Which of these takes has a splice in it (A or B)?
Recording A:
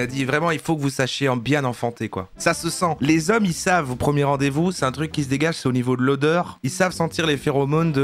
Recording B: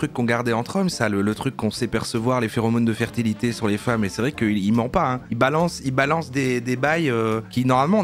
A